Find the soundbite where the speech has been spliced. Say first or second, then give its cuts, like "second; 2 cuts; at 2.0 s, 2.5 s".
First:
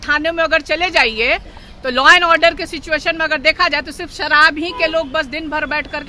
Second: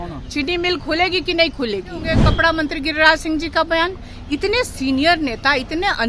second; 1 cut; at 2.2 s